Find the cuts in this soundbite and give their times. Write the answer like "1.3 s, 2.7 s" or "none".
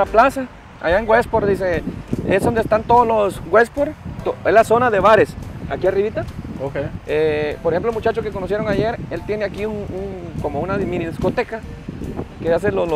none